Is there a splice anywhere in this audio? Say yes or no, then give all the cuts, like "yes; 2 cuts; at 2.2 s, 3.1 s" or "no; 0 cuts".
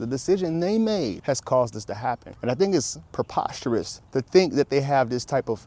yes; 3 cuts; at 1.2 s, 2.3 s, 4.0 s